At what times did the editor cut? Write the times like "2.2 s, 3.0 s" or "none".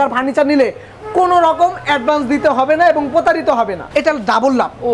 3.8 s

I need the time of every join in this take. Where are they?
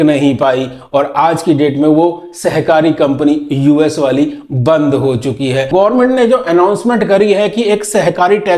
5.7 s

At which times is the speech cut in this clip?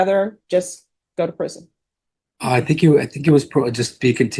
none

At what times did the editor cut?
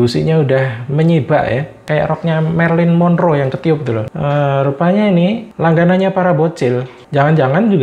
4.1 s, 5.5 s

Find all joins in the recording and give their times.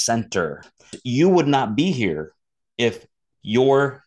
0.9 s

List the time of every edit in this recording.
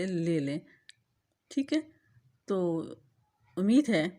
none

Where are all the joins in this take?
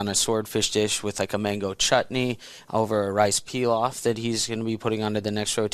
none

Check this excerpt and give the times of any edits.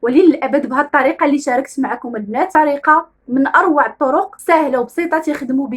2.5 s, 4.4 s

